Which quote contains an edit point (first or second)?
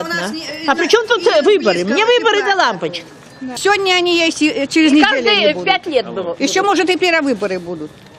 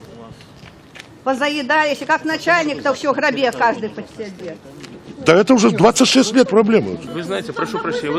first